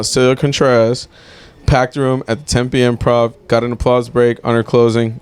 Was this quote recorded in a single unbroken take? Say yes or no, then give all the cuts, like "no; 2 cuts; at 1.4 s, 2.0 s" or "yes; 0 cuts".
yes; 0 cuts